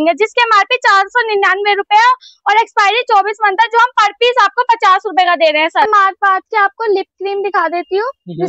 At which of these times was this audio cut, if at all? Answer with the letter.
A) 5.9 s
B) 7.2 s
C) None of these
A